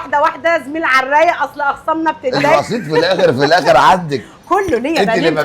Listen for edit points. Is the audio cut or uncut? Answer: cut